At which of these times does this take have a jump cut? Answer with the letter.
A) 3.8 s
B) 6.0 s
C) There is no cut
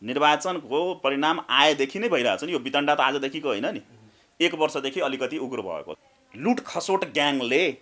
B